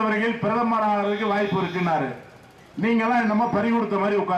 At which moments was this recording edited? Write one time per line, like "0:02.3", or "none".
none

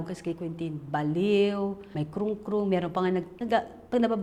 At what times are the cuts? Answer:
0:01.8
0:03.3

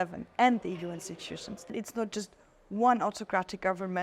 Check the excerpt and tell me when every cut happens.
0:01.7

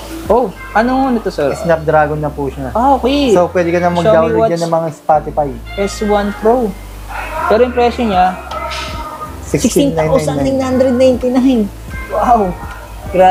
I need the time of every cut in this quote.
none

